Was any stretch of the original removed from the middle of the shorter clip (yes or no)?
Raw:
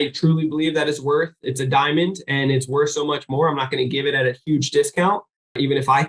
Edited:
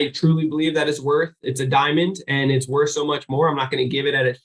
no